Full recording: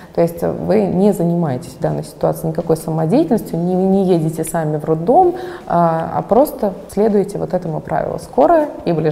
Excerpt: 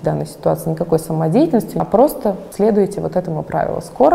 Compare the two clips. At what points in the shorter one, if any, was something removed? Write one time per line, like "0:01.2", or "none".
0:01.8